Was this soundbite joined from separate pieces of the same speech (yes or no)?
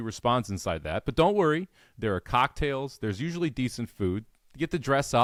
no